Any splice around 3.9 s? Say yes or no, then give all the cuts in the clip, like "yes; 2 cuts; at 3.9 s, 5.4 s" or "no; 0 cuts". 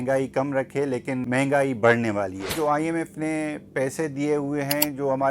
no; 2 cuts; at 1.2 s, 2.5 s